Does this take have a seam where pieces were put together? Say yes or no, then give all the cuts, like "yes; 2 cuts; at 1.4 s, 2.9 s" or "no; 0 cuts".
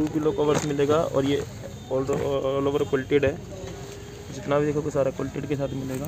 no; 0 cuts